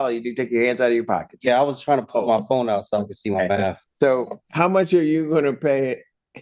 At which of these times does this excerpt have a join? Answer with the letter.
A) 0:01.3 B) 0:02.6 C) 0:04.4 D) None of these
C